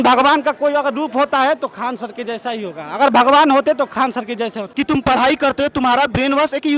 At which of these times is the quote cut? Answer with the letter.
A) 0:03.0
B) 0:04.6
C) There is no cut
B